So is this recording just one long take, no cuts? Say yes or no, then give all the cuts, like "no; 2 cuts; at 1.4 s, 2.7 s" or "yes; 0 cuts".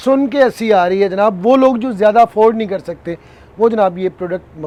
yes; 0 cuts